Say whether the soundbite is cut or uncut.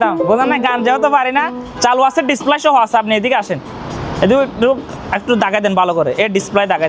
uncut